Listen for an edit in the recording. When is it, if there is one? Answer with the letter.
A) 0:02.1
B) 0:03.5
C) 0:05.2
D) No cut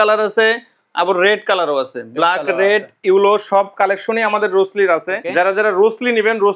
D